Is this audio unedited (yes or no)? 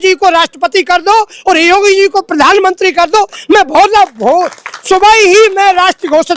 yes